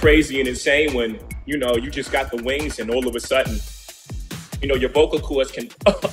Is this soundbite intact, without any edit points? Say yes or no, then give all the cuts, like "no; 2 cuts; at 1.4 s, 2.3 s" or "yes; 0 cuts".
yes; 0 cuts